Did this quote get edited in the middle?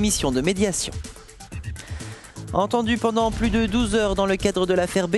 no; 0 cuts

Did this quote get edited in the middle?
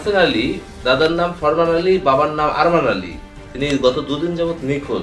no; 0 cuts

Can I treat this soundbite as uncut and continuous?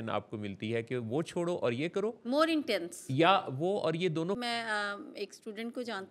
no; 1 cut; at 4.4 s

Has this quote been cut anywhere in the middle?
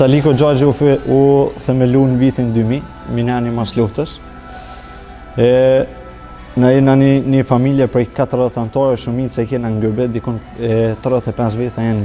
no; 0 cuts

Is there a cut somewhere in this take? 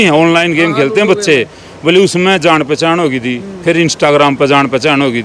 no; 0 cuts

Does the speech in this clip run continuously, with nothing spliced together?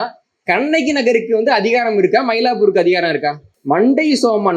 no; 1 cut; at 3.5 s

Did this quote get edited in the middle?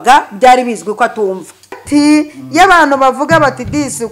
yes; 1 cut; at 1.8 s

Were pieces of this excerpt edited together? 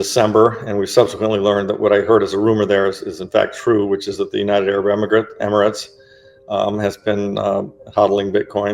no; 0 cuts

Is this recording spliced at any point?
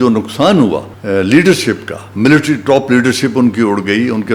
yes; 1 cut; at 0.9 s

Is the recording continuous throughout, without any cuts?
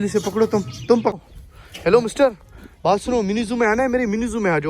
no; 1 cut; at 1.2 s

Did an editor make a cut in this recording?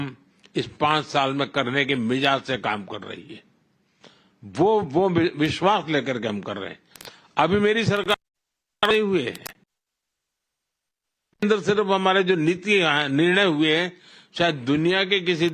yes; 1 cut; at 9.3 s

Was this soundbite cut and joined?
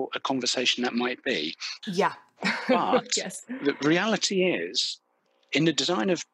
yes; 1 cut; at 1.7 s

